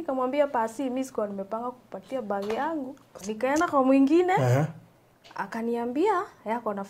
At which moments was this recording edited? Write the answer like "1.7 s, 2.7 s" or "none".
3.2 s